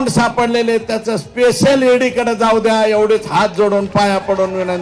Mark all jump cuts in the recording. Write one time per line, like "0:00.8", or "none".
none